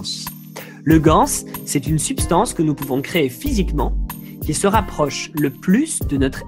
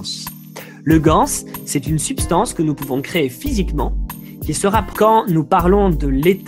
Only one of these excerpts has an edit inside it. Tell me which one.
first; 1 cut; at 4.9 s

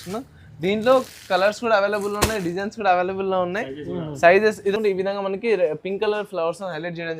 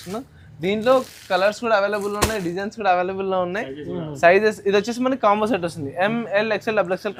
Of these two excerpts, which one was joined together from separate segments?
first; 1 cut; at 4.7 s

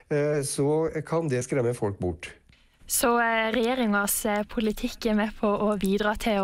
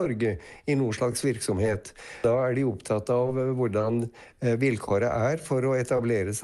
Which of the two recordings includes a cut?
second; 1 cut; at 2.2 s

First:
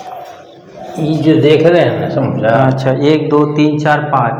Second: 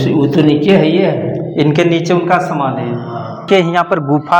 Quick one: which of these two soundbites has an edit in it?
second; 1 cut; at 3.4 s

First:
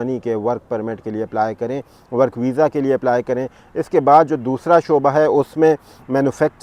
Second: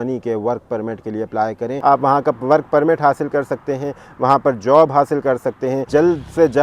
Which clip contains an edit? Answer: second; 2 cuts; at 1.7 s, 5.9 s

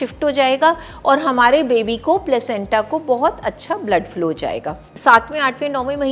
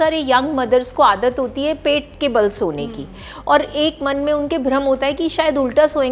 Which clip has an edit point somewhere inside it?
first; 1 cut; at 4.9 s

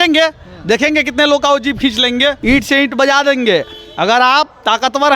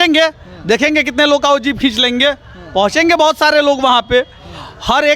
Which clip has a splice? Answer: first; 1 cut; at 2.4 s

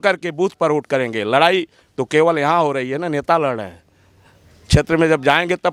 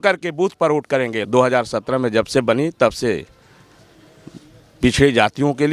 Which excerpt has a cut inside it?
second; 1 cut; at 1.2 s

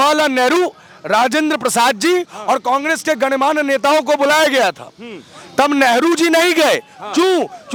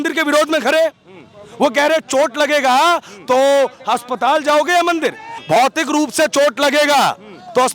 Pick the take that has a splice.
second; 1 cut; at 5.3 s

